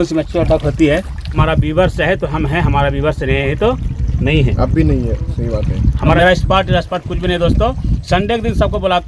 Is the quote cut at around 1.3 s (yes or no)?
yes